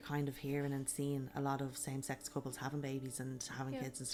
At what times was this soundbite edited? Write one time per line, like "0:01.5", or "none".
none